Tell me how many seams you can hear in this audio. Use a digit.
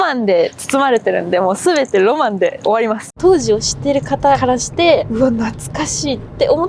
1